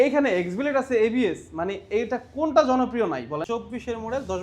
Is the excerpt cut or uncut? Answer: cut